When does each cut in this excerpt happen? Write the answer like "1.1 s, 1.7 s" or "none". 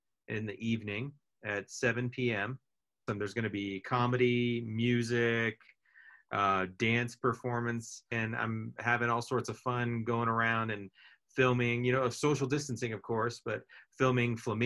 3.0 s, 8.1 s

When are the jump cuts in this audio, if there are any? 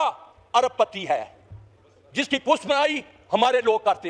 none

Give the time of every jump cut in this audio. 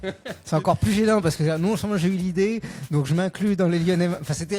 none

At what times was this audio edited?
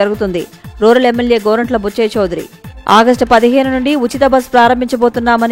none

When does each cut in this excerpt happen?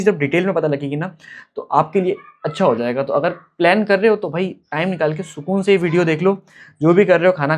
none

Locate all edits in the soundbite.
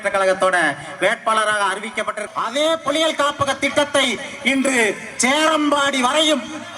2.2 s

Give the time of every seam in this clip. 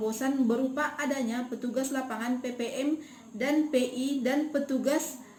none

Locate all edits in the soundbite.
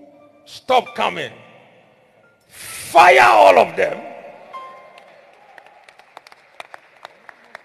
none

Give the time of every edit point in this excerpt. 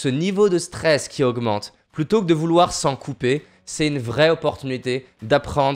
none

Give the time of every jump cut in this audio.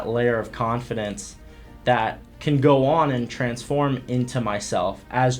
2.3 s

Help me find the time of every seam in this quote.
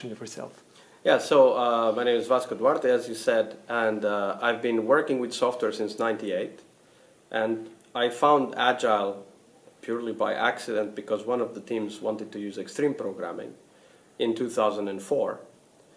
12.9 s

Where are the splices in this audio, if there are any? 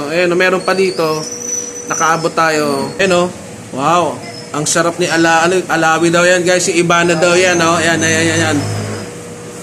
3.0 s

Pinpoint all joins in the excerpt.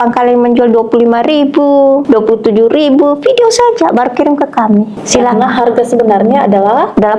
2.0 s, 5.0 s

